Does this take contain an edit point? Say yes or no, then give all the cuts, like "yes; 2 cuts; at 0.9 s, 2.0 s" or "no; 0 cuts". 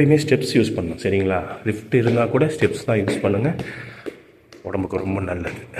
no; 0 cuts